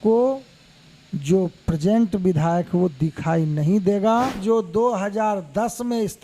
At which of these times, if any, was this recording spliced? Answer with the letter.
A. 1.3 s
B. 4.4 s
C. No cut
B